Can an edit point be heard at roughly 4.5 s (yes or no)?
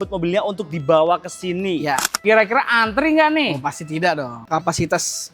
yes